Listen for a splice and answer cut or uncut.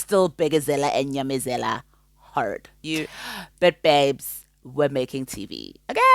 cut